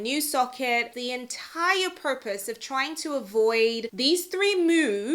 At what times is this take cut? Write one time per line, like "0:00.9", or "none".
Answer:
0:00.9